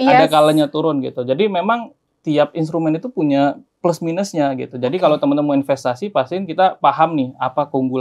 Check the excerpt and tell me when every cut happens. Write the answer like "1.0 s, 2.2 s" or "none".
none